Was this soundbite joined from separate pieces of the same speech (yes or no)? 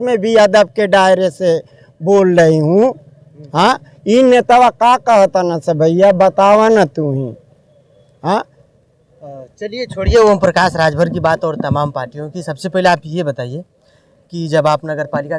no